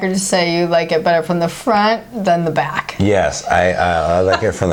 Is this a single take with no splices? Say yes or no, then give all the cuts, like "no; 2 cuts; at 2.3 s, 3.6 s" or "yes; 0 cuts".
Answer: yes; 0 cuts